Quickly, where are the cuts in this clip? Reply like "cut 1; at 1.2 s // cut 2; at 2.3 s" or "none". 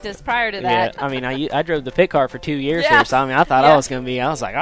cut 1; at 1.0 s